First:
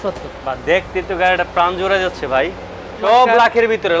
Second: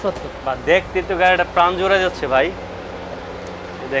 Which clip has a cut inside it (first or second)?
first